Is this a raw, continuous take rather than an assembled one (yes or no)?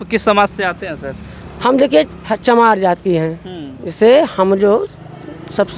yes